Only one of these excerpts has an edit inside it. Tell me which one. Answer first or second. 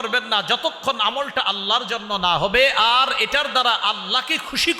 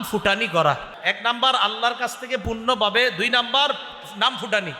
second